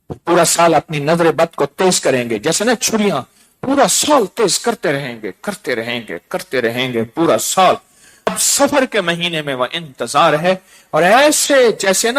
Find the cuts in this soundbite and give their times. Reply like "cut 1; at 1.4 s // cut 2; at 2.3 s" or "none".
cut 1; at 8.3 s